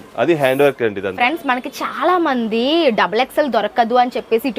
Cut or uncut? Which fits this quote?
cut